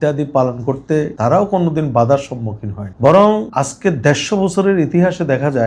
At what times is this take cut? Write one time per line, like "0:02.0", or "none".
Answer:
0:01.1